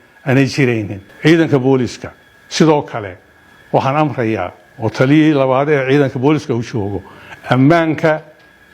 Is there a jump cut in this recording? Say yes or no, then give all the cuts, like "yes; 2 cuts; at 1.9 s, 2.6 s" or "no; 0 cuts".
yes; 1 cut; at 1.0 s